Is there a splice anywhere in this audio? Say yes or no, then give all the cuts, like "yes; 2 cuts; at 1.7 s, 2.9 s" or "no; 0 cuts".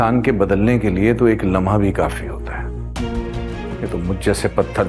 yes; 1 cut; at 3.6 s